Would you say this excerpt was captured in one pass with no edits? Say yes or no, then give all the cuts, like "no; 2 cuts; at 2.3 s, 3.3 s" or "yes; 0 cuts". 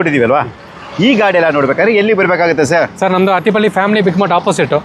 yes; 0 cuts